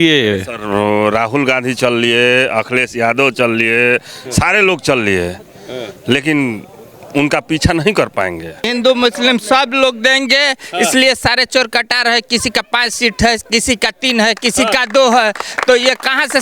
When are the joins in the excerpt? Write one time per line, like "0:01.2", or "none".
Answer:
0:08.7

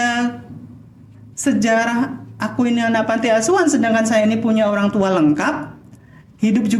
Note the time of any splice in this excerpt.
none

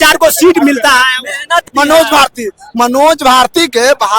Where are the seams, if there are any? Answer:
0:01.6

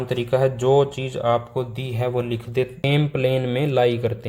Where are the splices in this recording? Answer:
0:02.8

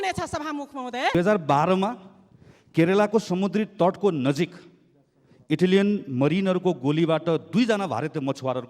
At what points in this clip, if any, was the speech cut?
0:01.1

